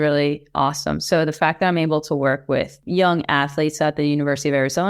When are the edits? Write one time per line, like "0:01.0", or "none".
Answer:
0:02.8